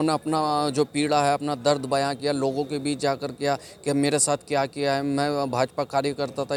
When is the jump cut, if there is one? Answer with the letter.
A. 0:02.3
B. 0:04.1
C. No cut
C